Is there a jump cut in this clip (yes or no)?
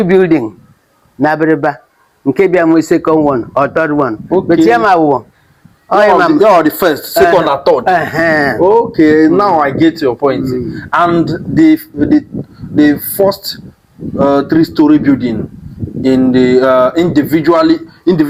no